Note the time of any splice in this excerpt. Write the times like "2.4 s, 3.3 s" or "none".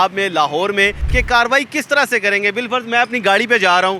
1.0 s